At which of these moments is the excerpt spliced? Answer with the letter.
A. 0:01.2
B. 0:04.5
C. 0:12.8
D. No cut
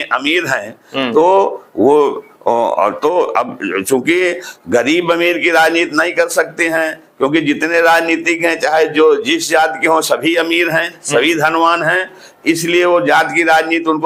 D